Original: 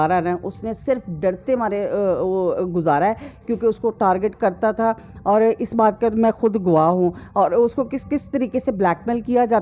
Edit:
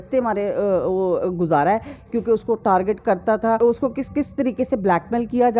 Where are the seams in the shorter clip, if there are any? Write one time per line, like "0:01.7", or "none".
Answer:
0:03.6